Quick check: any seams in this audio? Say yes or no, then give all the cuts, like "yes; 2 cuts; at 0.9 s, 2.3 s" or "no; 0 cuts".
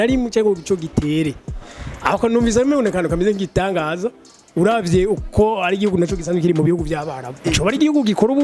yes; 1 cut; at 7.4 s